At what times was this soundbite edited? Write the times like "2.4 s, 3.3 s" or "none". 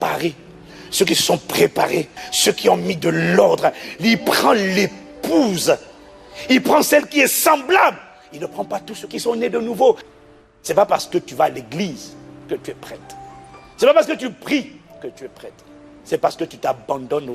2.2 s, 10.1 s